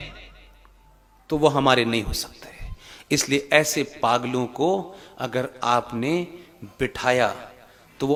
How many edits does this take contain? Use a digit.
0